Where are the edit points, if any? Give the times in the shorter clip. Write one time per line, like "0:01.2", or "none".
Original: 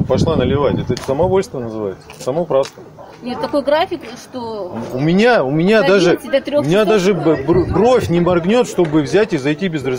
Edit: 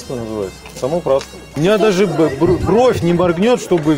0:01.6